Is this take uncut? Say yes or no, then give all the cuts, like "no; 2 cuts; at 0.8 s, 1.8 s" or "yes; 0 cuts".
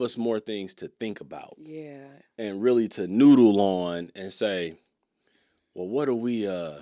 yes; 0 cuts